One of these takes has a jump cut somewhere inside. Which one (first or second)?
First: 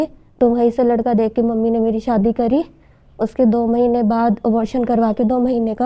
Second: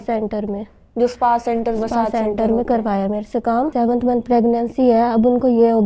second